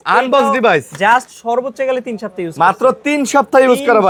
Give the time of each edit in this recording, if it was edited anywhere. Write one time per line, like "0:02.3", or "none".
none